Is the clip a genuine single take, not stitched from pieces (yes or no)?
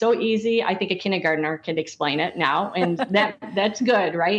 yes